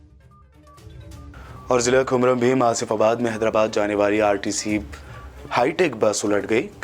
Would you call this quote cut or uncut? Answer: cut